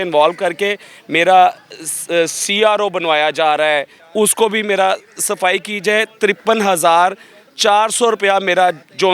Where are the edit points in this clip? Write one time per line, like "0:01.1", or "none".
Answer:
0:04.0